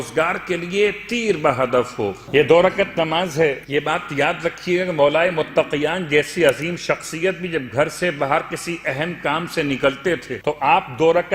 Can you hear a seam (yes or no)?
yes